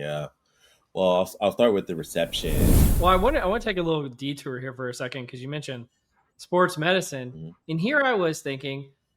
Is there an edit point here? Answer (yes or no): yes